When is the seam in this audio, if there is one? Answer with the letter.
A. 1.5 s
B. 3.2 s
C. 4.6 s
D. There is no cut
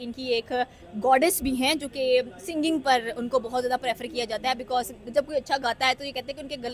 D